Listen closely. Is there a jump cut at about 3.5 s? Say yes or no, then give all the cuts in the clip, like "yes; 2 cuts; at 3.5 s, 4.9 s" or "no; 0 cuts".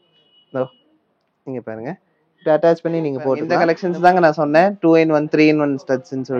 yes; 1 cut; at 3.5 s